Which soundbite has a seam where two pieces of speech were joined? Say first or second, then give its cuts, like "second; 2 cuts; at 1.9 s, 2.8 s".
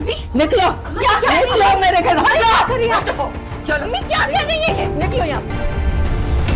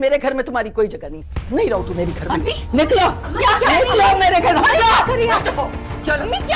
first; 1 cut; at 5.5 s